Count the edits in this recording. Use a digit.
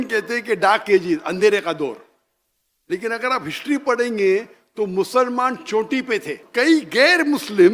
1